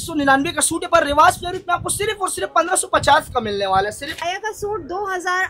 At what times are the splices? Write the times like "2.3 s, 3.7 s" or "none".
4.1 s